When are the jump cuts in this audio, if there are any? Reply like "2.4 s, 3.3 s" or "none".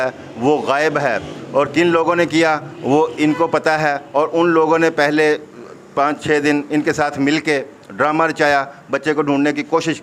none

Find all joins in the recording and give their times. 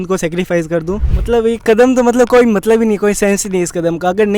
1.0 s

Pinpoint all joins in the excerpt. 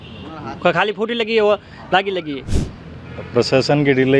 2.5 s

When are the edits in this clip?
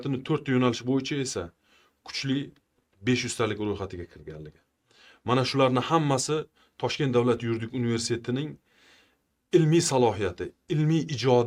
none

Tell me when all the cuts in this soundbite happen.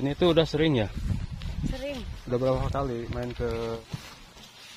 3.8 s

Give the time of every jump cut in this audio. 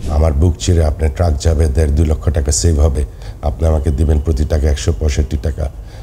none

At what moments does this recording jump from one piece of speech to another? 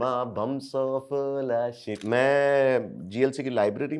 1.9 s

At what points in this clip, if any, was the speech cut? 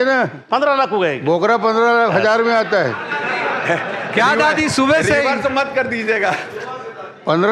none

